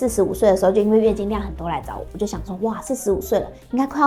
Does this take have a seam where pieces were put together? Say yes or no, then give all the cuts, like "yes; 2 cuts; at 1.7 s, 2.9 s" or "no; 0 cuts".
no; 0 cuts